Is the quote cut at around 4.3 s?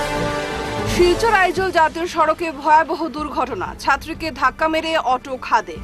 no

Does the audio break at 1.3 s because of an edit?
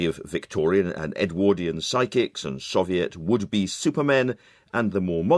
no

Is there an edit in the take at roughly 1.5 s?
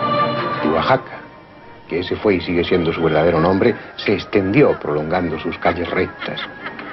yes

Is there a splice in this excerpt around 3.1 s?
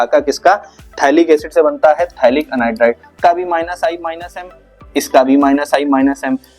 yes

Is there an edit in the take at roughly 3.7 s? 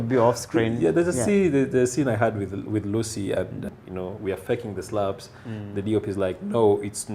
yes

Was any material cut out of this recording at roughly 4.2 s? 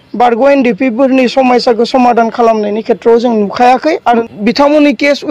yes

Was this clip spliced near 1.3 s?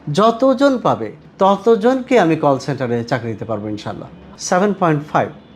no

